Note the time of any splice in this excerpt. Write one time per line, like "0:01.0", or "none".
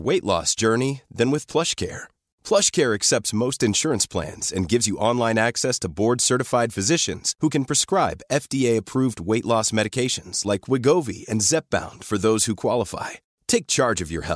none